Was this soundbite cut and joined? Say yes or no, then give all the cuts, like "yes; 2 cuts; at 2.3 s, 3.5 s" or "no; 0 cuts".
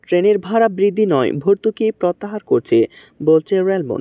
no; 0 cuts